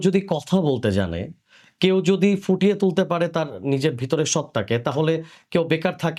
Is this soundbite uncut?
yes; 0 cuts

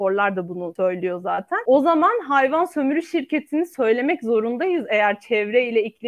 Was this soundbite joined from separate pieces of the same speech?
yes; 1 cut; at 1.1 s

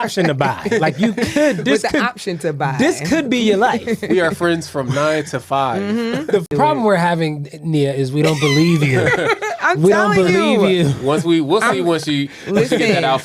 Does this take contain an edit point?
yes; 1 cut; at 6.5 s

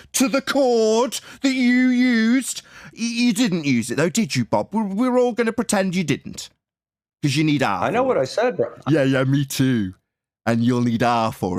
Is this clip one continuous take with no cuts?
yes; 0 cuts

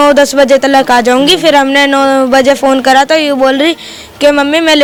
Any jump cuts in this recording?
no; 0 cuts

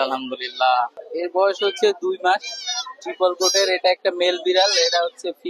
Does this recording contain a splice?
yes; 1 cut; at 1.0 s

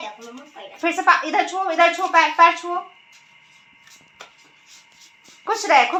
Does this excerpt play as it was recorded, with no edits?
yes; 0 cuts

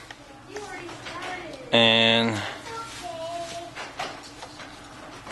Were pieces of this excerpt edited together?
yes; 1 cut; at 1.9 s

